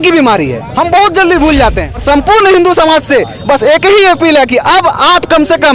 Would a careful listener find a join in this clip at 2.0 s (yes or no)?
yes